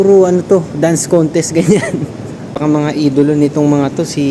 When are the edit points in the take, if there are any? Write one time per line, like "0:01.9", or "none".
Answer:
0:02.6